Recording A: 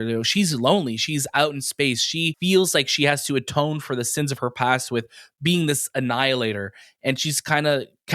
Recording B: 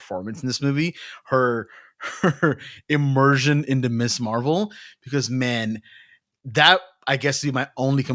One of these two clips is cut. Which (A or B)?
A